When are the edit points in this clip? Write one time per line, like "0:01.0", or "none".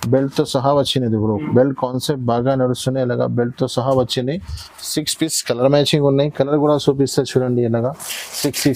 none